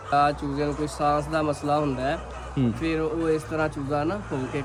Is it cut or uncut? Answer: uncut